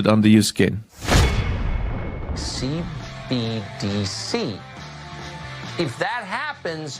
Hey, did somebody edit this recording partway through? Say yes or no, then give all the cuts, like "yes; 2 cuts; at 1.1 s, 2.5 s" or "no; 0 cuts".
yes; 2 cuts; at 0.9 s, 2.3 s